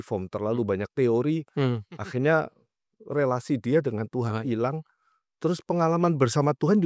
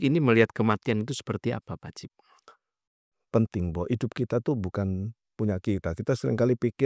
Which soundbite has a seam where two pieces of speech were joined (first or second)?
second